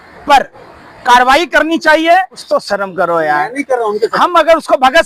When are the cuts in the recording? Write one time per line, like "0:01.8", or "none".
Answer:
0:02.4